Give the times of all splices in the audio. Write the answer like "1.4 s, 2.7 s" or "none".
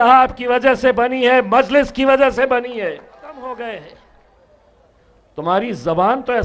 3.4 s